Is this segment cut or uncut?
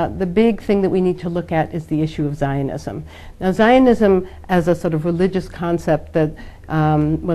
uncut